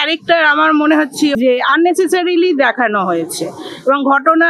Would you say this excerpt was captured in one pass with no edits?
no; 1 cut; at 1.3 s

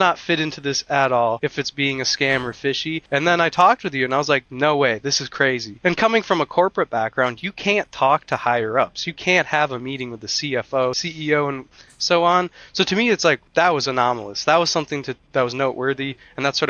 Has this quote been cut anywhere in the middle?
yes; 5 cuts; at 1.4 s, 3.0 s, 5.7 s, 11.1 s, 13.4 s

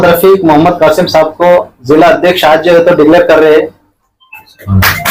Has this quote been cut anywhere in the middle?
no; 0 cuts

